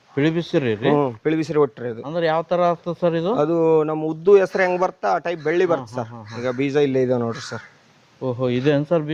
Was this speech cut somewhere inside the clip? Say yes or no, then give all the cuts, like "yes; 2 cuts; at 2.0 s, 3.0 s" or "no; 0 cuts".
no; 0 cuts